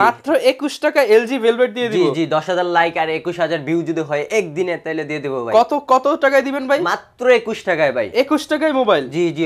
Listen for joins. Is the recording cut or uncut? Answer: uncut